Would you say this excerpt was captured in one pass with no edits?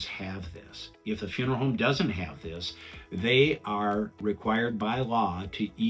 no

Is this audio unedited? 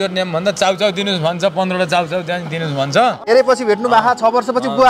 no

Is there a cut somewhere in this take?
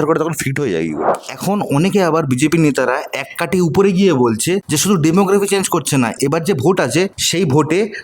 yes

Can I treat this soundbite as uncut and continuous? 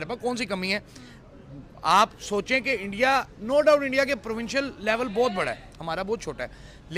yes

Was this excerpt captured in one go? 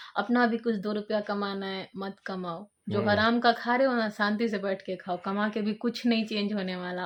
yes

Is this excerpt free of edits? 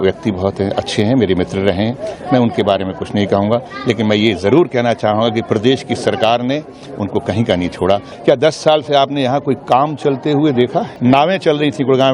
no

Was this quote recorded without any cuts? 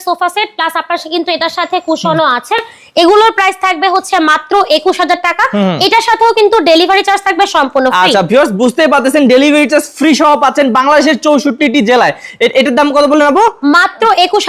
yes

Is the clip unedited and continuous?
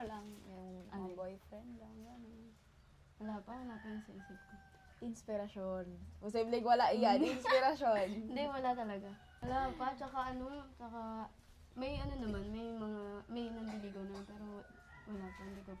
no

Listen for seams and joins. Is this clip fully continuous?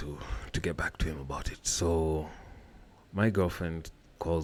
yes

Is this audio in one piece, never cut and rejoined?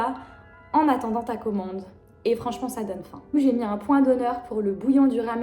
no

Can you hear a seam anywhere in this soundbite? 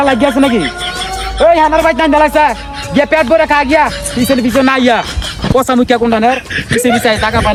no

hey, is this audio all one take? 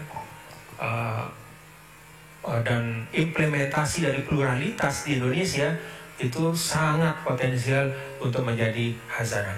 yes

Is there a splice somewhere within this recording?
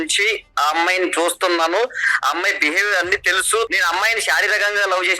yes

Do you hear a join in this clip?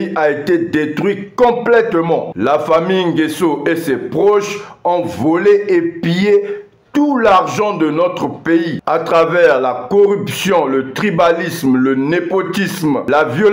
no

